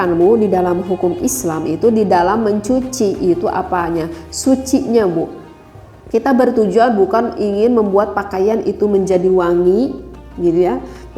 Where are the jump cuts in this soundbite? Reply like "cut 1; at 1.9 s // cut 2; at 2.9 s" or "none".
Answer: none